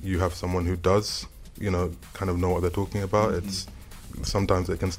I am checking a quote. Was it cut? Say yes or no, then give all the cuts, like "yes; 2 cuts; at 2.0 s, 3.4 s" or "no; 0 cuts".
no; 0 cuts